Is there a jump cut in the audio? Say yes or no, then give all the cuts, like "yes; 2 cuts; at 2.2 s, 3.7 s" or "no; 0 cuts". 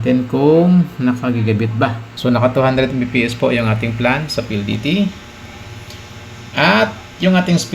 yes; 1 cut; at 2.1 s